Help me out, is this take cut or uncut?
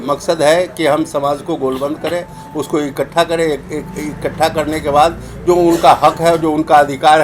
uncut